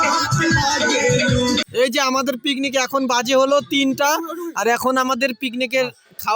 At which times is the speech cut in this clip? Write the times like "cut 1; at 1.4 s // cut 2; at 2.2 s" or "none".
cut 1; at 1.7 s